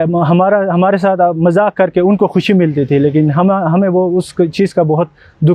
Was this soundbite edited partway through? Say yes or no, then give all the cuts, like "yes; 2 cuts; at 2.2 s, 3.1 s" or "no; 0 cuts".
no; 0 cuts